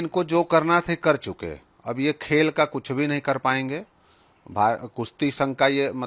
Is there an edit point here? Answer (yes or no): no